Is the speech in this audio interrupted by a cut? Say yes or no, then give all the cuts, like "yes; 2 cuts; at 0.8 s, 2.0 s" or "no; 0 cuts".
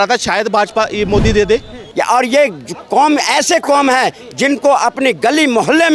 yes; 1 cut; at 1.8 s